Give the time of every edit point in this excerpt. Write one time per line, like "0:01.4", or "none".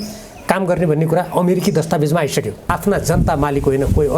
0:02.7